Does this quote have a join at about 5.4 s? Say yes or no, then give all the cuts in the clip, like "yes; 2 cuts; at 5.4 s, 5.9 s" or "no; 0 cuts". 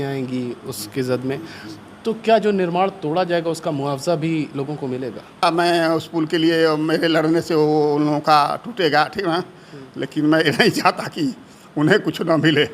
yes; 1 cut; at 5.4 s